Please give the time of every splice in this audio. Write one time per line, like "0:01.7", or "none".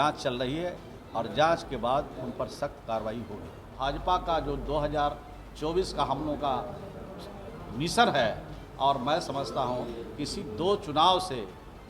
0:03.7